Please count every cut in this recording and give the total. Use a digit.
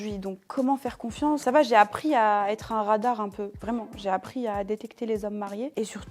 2